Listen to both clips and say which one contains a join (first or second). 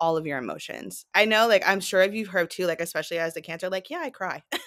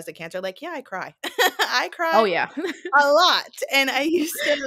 first